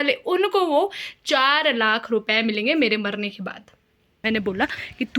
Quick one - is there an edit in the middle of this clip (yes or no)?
yes